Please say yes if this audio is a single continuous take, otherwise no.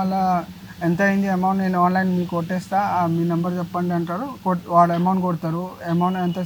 yes